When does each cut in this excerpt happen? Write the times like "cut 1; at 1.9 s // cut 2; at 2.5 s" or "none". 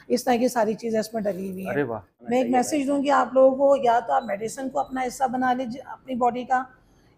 cut 1; at 2.1 s